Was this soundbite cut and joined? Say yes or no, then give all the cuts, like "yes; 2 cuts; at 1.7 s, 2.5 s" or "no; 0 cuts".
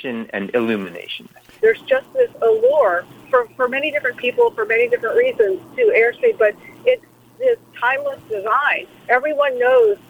yes; 2 cuts; at 1.6 s, 3.1 s